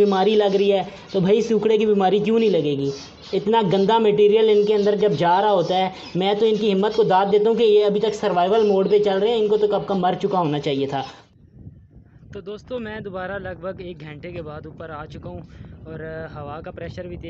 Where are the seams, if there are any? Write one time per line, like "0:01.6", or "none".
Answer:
0:11.2